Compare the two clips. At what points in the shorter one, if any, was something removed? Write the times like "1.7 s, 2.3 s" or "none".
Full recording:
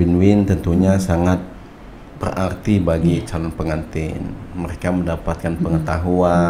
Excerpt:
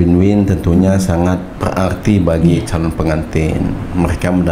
1.5 s

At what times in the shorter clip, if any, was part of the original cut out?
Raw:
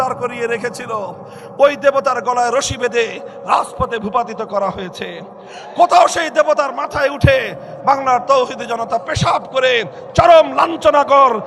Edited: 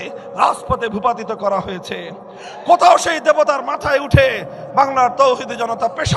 none

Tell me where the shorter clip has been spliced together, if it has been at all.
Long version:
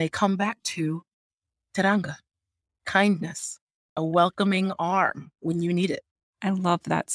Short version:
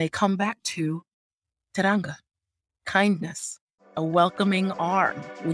none

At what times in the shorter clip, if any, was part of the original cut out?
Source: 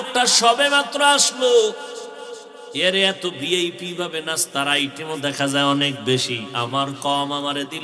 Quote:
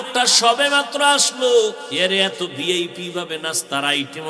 1.8 s

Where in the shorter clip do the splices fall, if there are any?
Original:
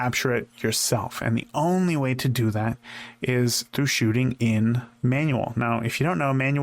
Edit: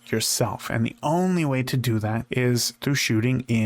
2.2 s

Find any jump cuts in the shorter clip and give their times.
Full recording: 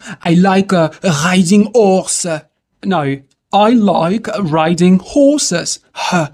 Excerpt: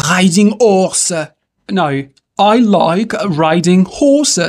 none

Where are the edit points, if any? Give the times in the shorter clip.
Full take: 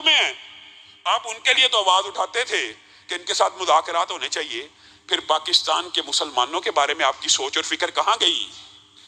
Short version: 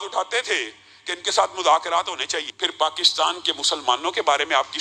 2.5 s

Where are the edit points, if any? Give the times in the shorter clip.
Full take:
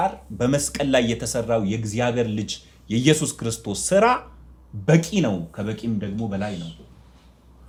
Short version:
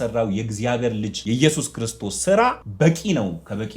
1.2 s, 2.6 s

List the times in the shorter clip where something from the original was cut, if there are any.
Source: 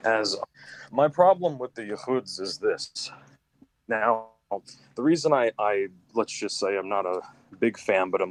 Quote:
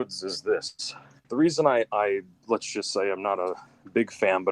1.1 s

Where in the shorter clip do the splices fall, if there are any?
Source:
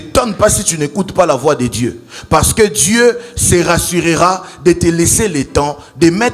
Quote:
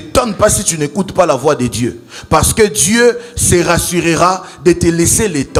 none

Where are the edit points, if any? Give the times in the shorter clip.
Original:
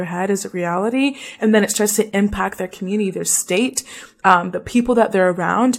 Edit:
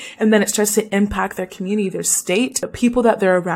2.6 s

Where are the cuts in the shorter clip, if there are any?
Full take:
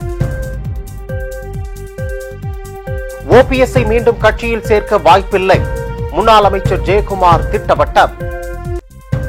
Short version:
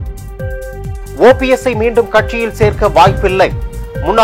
1.1 s

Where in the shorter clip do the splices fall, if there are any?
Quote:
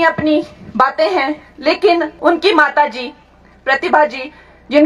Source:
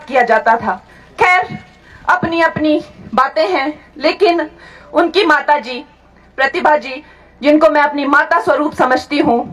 2.1 s

